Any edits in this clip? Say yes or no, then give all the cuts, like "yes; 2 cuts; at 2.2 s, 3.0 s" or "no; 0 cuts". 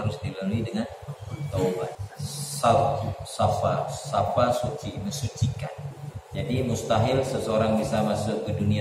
yes; 2 cuts; at 2.0 s, 6.0 s